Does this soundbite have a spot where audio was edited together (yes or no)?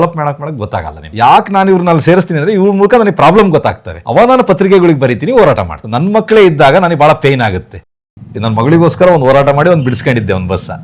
yes